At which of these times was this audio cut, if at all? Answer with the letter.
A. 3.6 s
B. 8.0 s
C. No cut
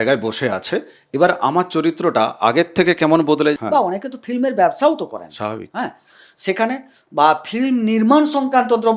A